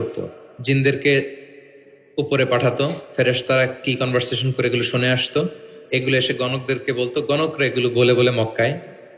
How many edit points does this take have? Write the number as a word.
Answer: zero